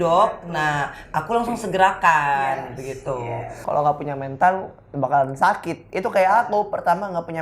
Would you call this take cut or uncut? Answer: cut